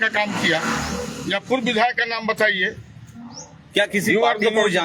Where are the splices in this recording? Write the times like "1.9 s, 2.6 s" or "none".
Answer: none